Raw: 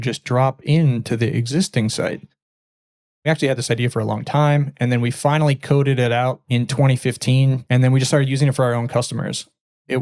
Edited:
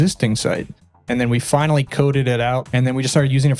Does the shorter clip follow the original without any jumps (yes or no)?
no